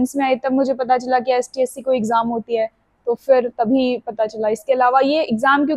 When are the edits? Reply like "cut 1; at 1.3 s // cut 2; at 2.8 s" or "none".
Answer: none